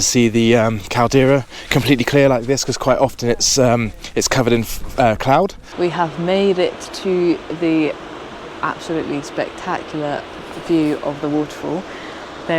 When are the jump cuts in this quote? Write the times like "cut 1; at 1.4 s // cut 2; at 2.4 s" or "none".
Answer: cut 1; at 5.6 s

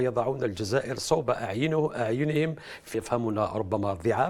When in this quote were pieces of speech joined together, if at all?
cut 1; at 2.9 s

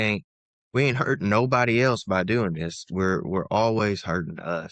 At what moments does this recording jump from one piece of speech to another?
none

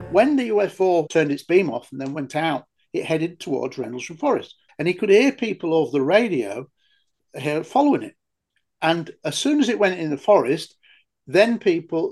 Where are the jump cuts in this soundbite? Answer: cut 1; at 1.1 s // cut 2; at 4.6 s

